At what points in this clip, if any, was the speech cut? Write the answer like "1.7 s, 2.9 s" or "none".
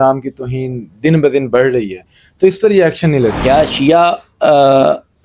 3.4 s